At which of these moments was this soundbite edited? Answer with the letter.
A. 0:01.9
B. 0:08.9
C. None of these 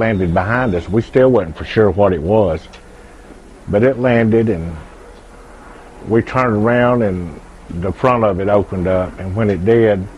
A